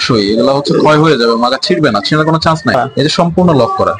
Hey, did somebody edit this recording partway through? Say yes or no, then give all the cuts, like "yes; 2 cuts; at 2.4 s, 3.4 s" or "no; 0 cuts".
yes; 1 cut; at 2.8 s